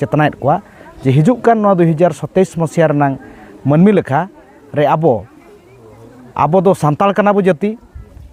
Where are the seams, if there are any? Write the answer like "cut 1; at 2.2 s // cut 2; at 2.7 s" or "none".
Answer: none